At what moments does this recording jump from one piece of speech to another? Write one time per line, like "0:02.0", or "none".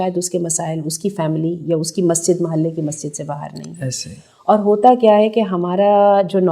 none

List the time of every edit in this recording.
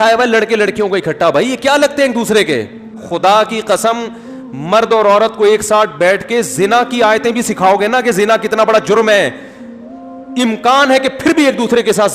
0:03.0

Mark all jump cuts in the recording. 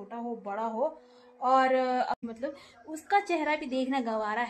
0:02.2

